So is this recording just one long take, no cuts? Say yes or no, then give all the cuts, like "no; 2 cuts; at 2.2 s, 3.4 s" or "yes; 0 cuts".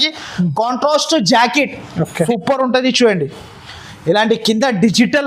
no; 1 cut; at 2.3 s